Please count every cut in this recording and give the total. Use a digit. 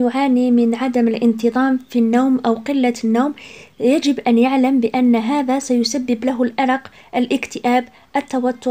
0